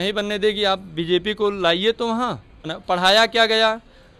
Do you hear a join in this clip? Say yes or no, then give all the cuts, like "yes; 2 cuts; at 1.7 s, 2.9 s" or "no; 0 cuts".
yes; 1 cut; at 2.7 s